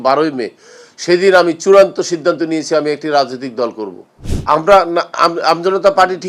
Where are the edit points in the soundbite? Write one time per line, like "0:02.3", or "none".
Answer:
0:04.1